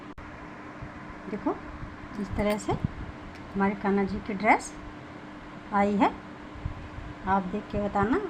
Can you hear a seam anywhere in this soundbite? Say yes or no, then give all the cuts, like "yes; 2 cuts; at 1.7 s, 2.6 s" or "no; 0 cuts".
no; 0 cuts